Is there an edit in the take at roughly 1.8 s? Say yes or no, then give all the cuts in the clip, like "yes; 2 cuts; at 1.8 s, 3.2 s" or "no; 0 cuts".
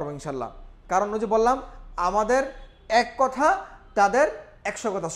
no; 0 cuts